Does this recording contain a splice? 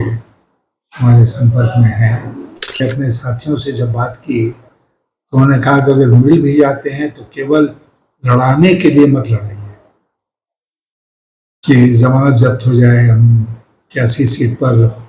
yes; 1 cut; at 2.8 s

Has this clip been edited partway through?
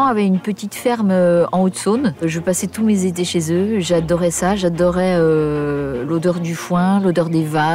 yes; 1 cut; at 2.2 s

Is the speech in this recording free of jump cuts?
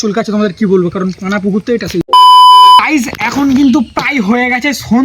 no; 2 cuts; at 2.1 s, 2.9 s

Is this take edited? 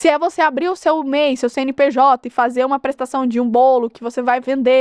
no; 0 cuts

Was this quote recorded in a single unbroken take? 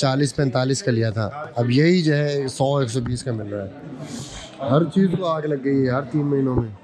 yes; 0 cuts

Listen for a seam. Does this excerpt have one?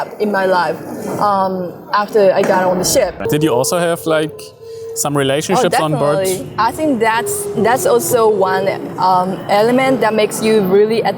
yes; 1 cut; at 3.2 s

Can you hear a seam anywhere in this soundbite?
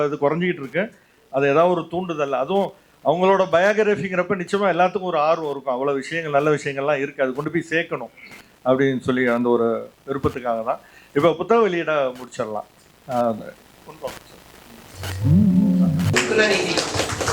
yes; 1 cut; at 16.1 s

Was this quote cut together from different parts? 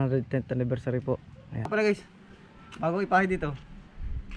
yes; 1 cut; at 1.7 s

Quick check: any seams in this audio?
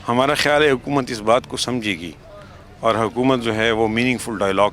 no; 0 cuts

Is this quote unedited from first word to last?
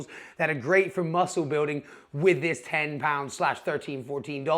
yes; 0 cuts

